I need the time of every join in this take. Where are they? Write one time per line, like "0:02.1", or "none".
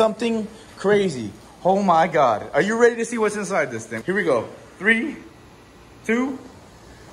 0:03.9